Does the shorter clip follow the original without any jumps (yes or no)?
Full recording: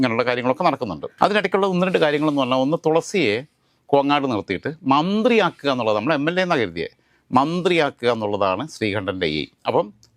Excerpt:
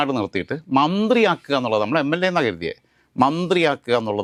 yes